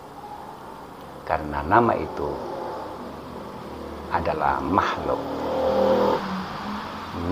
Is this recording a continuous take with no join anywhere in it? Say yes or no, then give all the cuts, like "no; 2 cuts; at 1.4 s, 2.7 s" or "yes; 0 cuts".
yes; 0 cuts